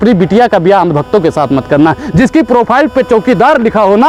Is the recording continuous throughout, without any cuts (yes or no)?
yes